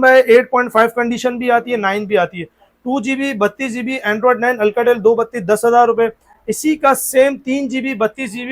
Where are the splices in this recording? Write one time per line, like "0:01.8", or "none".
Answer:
none